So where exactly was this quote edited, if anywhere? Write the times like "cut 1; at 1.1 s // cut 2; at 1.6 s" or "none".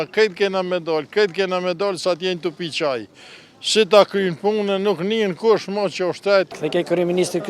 cut 1; at 6.5 s

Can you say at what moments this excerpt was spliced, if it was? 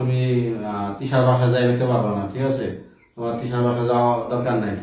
none

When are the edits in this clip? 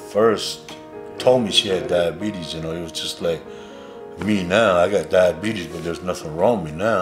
none

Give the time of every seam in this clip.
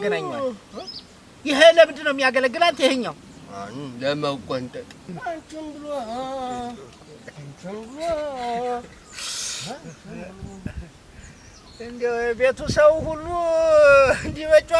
cut 1; at 5.0 s

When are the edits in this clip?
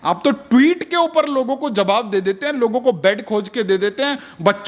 none

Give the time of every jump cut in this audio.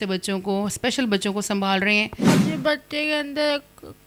cut 1; at 2.2 s

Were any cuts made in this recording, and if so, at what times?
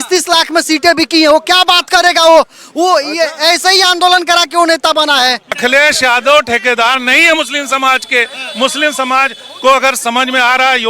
cut 1; at 5.6 s

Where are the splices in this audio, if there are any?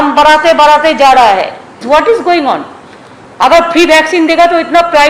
cut 1; at 1.8 s

